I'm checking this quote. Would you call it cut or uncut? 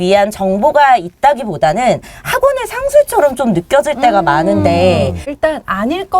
cut